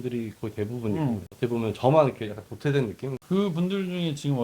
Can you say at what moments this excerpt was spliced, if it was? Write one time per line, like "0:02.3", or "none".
0:01.3
0:03.1